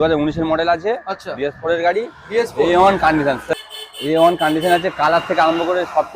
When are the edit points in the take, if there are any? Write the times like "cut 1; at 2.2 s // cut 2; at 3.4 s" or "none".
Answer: cut 1; at 3.4 s